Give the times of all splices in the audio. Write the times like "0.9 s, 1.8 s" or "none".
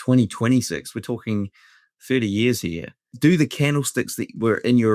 3.1 s

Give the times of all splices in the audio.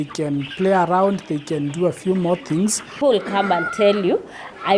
2.9 s

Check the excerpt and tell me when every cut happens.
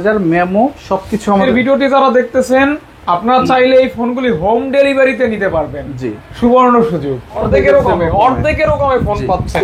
1.4 s, 7.4 s

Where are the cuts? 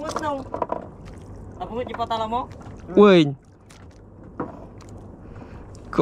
none

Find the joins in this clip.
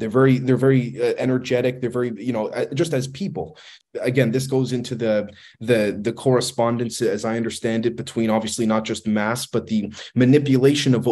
3.7 s

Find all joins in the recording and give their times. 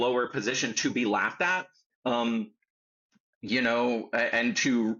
none

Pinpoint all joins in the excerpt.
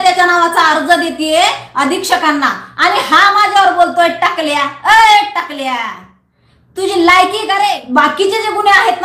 7.8 s

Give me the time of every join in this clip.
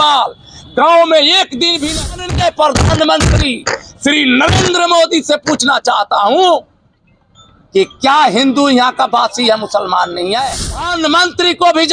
2.2 s, 10.9 s

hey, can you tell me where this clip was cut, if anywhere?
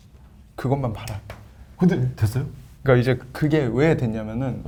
none

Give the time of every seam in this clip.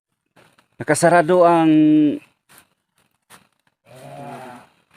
none

